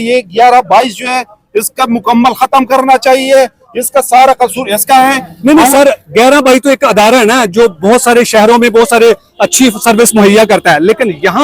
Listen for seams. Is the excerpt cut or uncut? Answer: uncut